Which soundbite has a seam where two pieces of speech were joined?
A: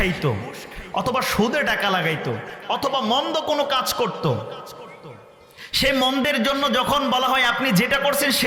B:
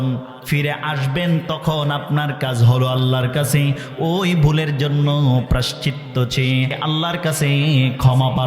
B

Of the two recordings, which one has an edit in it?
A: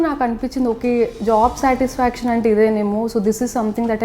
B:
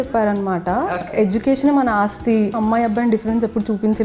B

